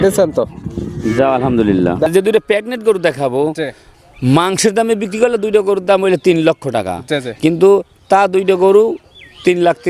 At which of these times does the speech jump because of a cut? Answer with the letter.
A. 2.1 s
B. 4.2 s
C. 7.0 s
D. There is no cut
A